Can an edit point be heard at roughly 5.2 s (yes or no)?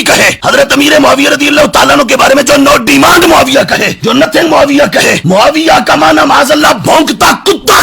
yes